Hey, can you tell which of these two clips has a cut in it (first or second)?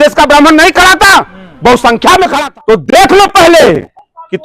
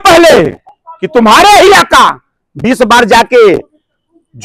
first